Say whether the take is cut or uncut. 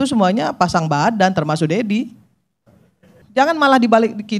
cut